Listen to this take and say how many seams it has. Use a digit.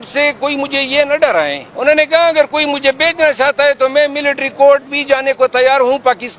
1